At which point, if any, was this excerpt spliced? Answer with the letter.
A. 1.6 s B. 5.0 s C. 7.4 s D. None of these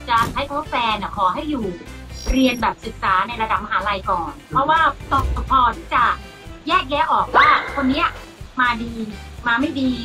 B